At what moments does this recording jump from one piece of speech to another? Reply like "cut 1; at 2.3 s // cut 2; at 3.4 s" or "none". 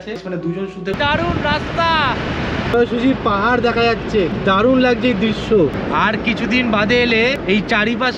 cut 1; at 0.9 s

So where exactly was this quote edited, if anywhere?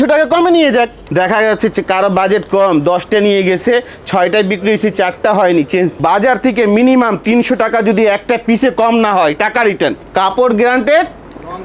cut 1; at 1.0 s // cut 2; at 6.0 s // cut 3; at 10.0 s

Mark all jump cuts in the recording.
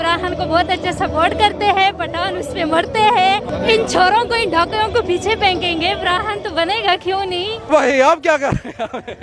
cut 1; at 3.5 s // cut 2; at 7.7 s

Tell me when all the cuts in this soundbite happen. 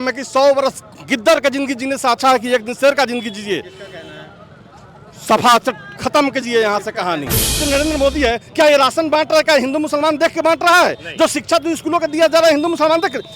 cut 1; at 7.6 s

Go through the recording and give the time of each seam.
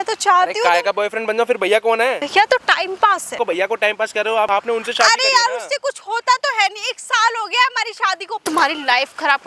cut 1; at 2.2 s // cut 2; at 3.3 s // cut 3; at 4.5 s // cut 4; at 8.4 s

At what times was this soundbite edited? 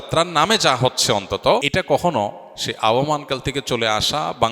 cut 1; at 1.7 s

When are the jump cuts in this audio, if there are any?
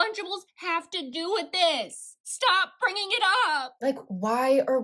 none

